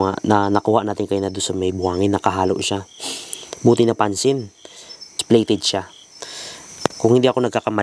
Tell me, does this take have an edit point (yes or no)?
yes